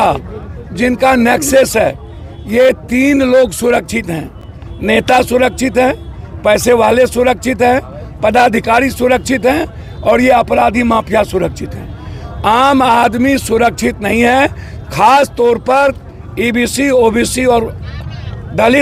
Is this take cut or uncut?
uncut